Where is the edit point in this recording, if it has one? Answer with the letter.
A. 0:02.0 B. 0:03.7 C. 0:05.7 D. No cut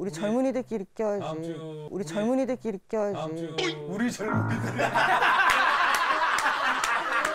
D